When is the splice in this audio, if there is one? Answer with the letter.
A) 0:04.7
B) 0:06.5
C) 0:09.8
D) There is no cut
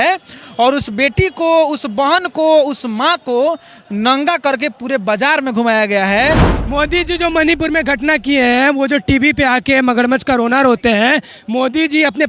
B